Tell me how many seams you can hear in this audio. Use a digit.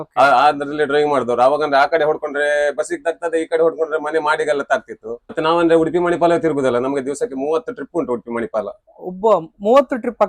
1